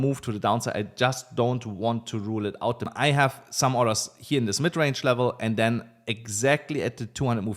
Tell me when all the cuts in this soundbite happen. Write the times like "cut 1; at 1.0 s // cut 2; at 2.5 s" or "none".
cut 1; at 2.9 s